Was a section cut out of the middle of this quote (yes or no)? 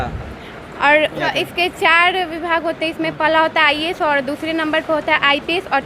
yes